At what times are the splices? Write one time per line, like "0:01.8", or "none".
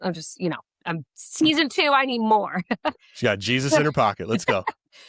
none